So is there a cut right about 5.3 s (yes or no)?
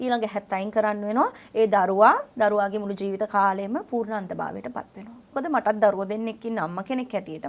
yes